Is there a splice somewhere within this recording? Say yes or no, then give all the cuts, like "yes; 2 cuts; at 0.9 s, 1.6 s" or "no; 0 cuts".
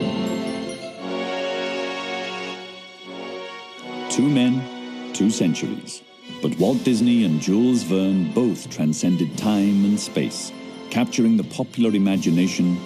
no; 0 cuts